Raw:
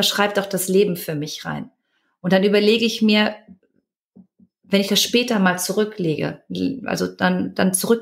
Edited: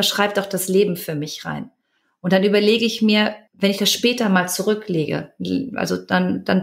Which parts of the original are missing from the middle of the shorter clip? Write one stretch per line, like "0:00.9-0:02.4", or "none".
0:03.5-0:04.6